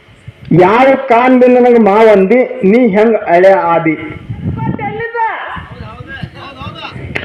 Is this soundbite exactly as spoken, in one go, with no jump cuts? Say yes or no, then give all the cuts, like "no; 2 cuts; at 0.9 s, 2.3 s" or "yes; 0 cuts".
no; 1 cut; at 4.8 s